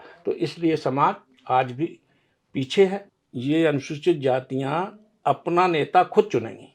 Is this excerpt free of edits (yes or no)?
no